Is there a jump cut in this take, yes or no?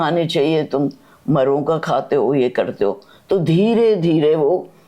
no